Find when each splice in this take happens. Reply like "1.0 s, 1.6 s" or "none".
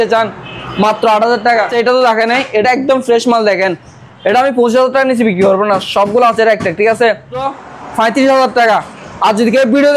1.7 s, 7.5 s